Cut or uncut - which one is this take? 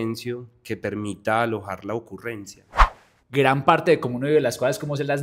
cut